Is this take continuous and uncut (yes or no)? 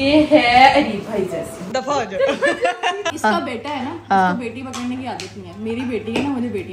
no